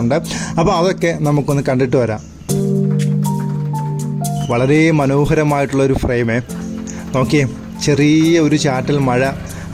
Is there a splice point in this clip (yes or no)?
no